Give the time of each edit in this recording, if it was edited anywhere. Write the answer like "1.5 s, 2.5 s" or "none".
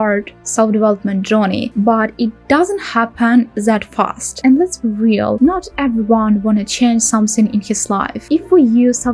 8.2 s